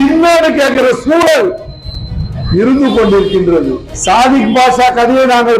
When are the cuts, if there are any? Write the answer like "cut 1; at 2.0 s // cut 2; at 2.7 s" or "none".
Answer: cut 1; at 3.9 s